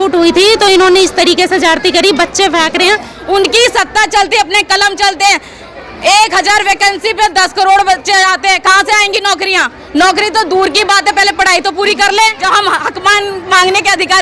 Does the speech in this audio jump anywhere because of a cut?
yes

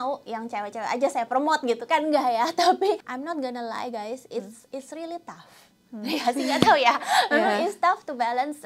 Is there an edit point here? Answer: yes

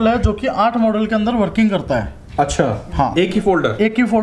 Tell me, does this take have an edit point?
no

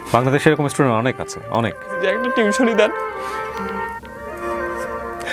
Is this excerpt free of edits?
no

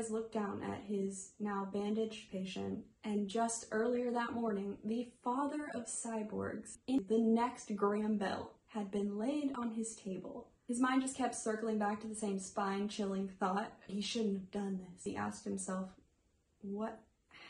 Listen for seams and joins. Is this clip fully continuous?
no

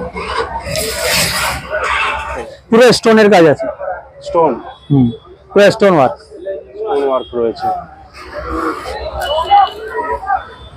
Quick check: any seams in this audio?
yes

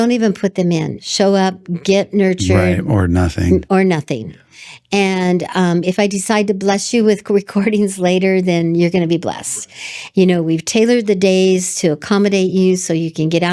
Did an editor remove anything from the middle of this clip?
yes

